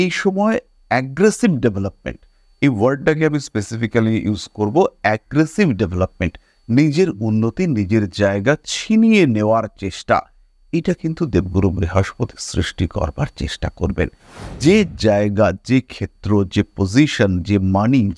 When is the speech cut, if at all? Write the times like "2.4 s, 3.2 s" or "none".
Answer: none